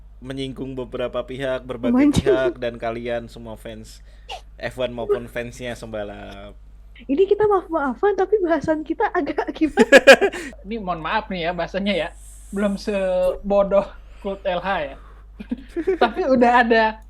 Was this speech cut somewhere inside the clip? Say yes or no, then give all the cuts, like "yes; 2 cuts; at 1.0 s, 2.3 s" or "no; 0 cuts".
yes; 2 cuts; at 6.9 s, 10.5 s